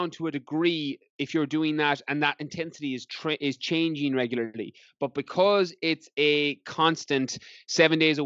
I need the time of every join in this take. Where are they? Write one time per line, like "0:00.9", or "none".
none